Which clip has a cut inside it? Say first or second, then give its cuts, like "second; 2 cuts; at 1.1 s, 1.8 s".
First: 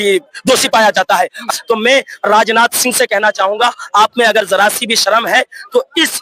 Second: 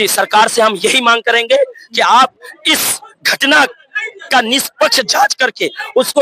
first; 1 cut; at 1.5 s